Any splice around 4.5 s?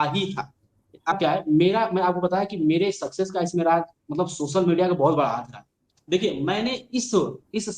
no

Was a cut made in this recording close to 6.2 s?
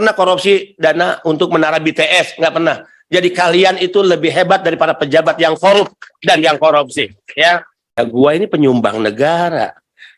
no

